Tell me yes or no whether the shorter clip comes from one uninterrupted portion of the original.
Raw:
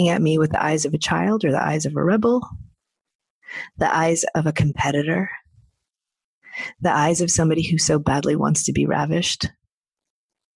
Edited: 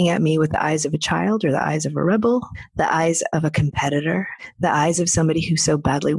no